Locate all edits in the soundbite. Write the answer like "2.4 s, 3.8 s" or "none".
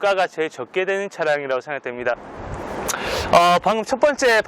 2.3 s